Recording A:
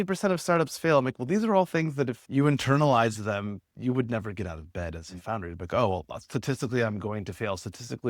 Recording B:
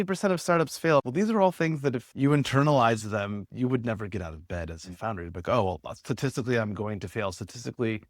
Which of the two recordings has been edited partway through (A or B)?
B